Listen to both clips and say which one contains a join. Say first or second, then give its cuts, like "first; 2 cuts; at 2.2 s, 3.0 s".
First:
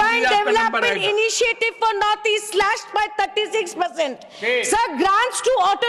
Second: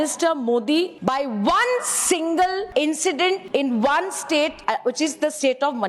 second; 4 cuts; at 0.9 s, 2.7 s, 3.4 s, 4.6 s